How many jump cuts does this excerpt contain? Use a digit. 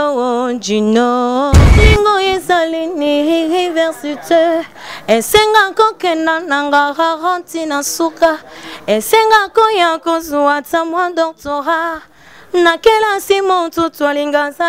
1